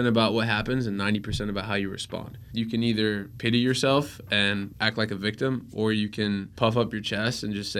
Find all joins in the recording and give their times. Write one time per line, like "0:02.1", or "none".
0:02.4
0:03.3
0:04.7
0:06.5